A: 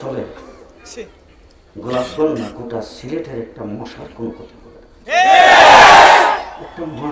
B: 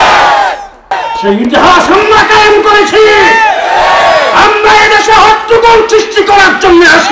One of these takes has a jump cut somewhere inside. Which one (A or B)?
B